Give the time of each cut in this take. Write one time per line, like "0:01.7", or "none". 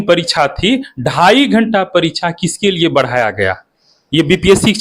none